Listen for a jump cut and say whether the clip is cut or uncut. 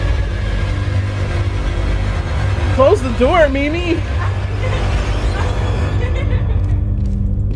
uncut